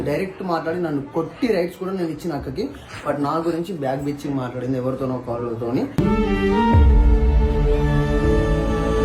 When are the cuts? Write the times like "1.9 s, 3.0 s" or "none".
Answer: none